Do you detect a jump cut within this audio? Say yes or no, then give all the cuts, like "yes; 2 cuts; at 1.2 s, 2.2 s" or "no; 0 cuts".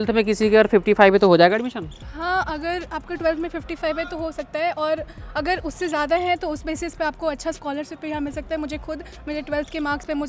no; 0 cuts